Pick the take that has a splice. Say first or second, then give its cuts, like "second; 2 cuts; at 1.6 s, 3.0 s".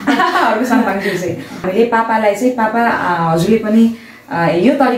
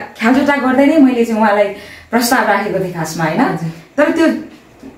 first; 1 cut; at 1.6 s